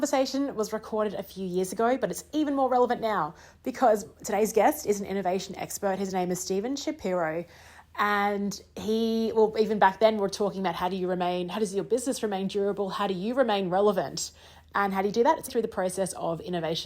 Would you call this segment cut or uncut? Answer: cut